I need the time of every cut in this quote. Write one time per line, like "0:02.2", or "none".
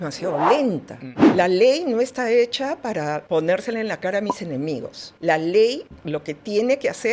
0:01.1